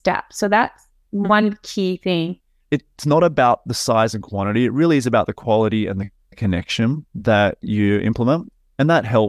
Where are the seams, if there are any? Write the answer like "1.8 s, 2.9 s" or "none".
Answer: 2.5 s